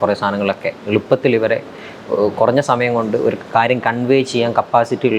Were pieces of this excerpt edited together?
no; 0 cuts

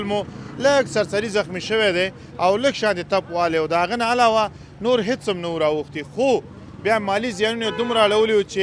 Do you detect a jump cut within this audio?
no; 0 cuts

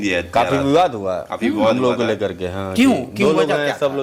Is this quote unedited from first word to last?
yes; 0 cuts

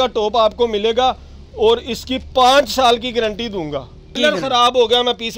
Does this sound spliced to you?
yes; 1 cut; at 4.1 s

